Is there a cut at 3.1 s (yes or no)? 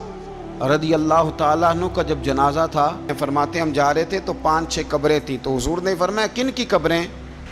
yes